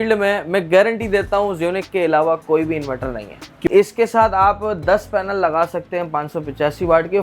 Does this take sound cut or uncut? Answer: cut